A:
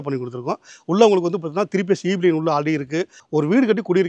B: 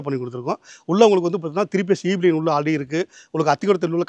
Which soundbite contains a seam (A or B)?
A